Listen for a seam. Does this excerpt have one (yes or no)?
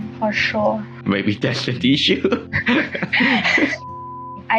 yes